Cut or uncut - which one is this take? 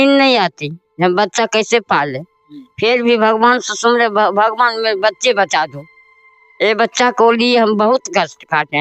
uncut